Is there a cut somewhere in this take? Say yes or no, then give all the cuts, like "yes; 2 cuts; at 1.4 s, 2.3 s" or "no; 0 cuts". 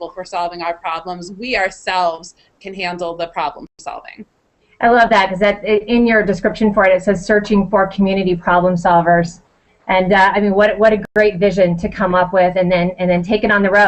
yes; 1 cut; at 10.5 s